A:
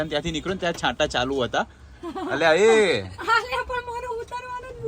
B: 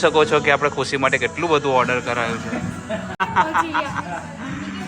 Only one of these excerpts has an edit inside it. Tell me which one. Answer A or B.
B